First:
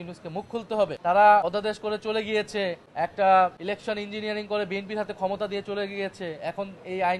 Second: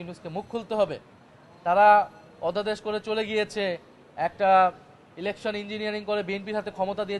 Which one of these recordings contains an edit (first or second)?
first